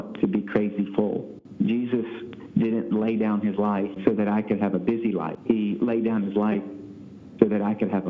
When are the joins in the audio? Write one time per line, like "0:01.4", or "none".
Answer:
0:01.4
0:04.0
0:05.3